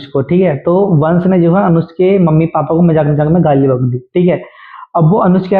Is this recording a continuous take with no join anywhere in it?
yes; 0 cuts

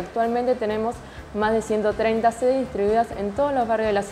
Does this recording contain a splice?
no; 0 cuts

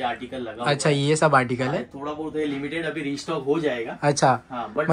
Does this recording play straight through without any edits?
yes; 0 cuts

